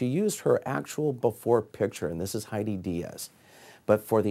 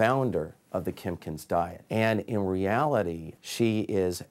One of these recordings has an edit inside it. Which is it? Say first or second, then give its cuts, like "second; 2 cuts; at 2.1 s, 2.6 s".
second; 2 cuts; at 1.8 s, 3.3 s